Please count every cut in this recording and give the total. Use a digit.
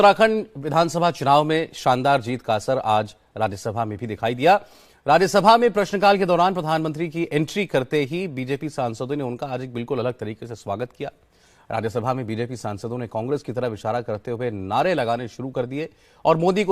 0